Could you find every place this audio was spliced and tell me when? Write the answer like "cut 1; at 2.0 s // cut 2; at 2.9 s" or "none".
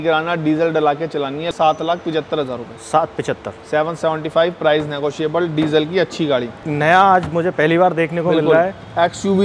cut 1; at 1.5 s // cut 2; at 6.6 s